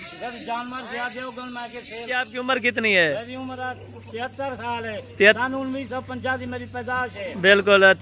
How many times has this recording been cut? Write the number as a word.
one